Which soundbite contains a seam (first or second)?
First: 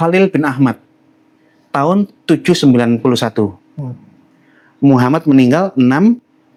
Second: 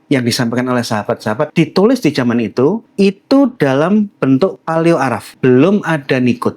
second